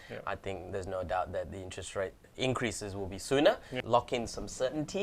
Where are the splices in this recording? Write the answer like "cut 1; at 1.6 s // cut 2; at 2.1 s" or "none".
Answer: cut 1; at 2.3 s // cut 2; at 3.8 s